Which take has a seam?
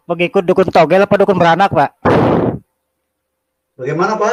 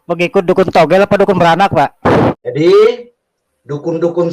second; 1 cut; at 2.3 s

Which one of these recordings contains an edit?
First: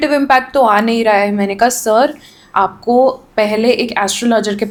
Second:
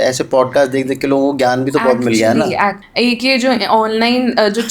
second; 1 cut; at 2.8 s

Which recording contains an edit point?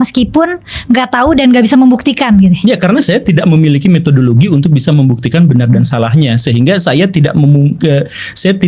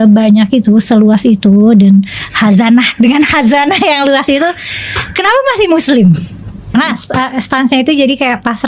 second; 1 cut; at 6.7 s

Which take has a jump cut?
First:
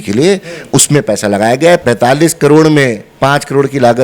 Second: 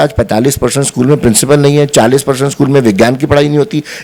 first; 2 cuts; at 1.8 s, 3.0 s

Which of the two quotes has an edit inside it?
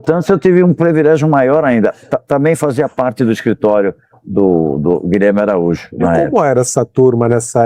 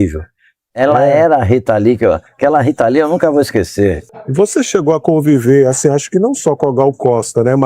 second; 1 cut; at 4.1 s

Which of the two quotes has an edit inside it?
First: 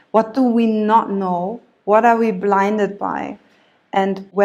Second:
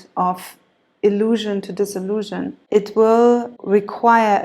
second; 2 cuts; at 2.6 s, 3.5 s

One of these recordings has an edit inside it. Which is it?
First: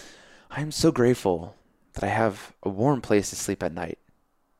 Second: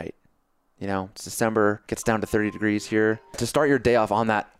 second; 2 cuts; at 1.9 s, 3.4 s

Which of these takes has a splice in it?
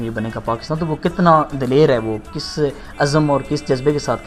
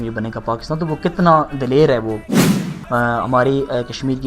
second; 1 cut; at 2.5 s

